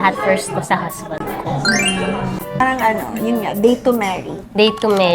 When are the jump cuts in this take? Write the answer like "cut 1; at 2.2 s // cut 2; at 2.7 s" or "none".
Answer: cut 1; at 2.6 s